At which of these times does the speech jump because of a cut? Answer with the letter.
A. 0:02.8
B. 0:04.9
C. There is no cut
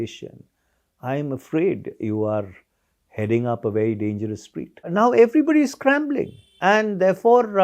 B